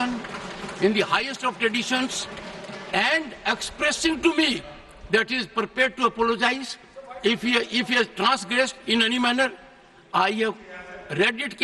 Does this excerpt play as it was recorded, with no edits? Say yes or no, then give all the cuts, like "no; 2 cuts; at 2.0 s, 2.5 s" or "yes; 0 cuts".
yes; 0 cuts